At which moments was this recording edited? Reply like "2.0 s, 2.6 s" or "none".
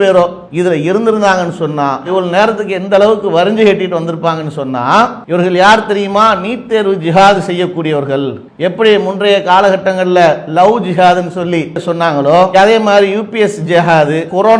5.2 s